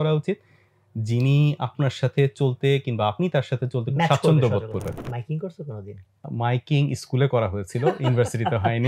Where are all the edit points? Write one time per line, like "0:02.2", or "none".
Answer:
0:05.0
0:06.3